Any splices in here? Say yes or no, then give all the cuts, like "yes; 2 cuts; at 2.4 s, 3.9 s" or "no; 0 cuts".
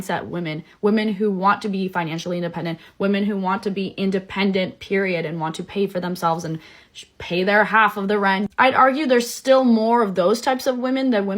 yes; 2 cuts; at 1.1 s, 8.3 s